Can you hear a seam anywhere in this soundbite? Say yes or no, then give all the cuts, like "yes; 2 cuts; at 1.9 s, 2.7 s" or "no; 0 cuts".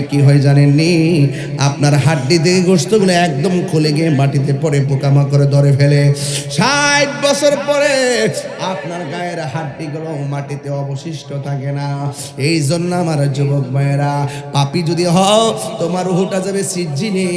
no; 0 cuts